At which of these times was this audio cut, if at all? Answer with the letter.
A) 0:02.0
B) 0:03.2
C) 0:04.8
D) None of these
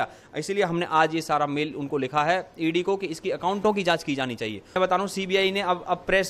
C